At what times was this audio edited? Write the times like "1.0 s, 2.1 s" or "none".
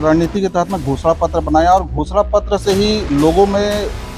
none